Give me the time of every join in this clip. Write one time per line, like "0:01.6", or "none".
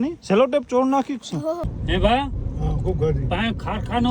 0:01.7